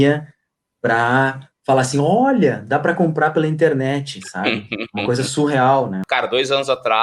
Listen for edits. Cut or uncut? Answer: cut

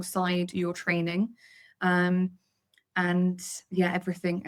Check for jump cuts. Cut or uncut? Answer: uncut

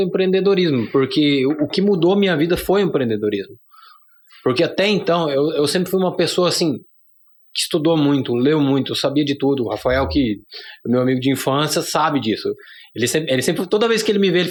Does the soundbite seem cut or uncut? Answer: uncut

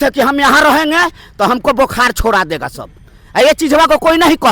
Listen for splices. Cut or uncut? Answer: uncut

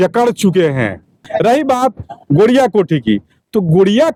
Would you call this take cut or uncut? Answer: uncut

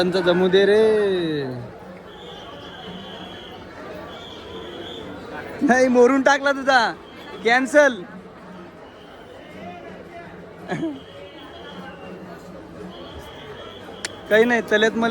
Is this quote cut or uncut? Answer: uncut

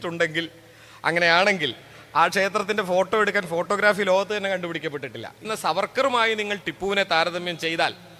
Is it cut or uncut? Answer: cut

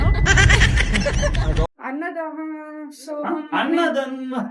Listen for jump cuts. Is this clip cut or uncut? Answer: cut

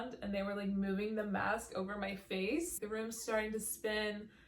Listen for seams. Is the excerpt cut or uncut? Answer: cut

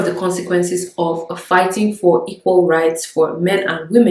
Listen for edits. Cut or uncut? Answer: uncut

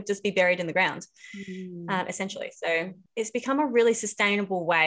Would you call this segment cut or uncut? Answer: cut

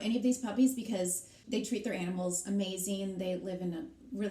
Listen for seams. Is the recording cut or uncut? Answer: cut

